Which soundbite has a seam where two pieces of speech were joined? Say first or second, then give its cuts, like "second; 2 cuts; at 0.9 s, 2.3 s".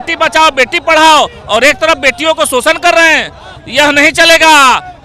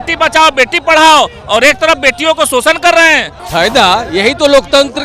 second; 1 cut; at 3.4 s